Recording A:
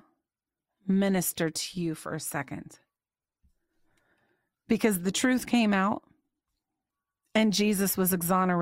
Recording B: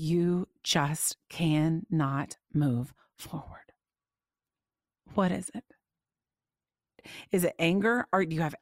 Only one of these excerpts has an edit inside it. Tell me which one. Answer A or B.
B